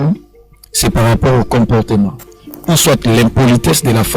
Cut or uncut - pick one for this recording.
cut